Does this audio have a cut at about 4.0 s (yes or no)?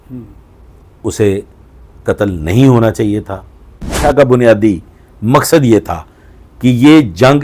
yes